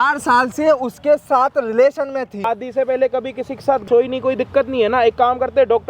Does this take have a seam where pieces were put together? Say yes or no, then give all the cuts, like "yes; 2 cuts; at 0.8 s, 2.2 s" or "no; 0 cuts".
yes; 2 cuts; at 2.5 s, 3.8 s